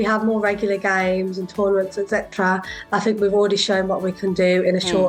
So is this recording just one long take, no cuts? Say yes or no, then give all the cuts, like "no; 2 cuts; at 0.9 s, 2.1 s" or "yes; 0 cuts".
yes; 0 cuts